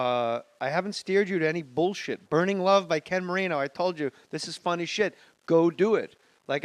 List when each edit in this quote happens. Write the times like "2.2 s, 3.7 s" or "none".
none